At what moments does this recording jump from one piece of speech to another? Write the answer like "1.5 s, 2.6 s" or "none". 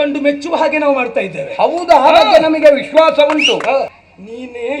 3.9 s